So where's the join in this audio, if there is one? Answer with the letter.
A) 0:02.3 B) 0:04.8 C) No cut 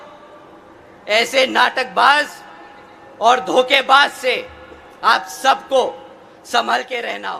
C